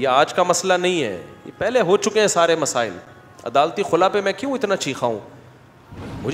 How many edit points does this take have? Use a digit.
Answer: 0